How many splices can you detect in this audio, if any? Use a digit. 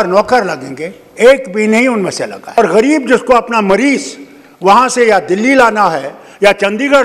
1